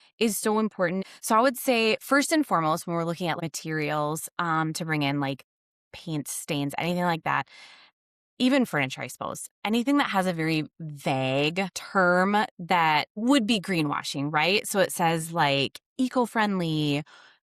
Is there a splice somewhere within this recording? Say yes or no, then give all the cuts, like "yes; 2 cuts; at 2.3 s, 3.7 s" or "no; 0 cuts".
yes; 4 cuts; at 1.0 s, 3.4 s, 11.8 s, 13.1 s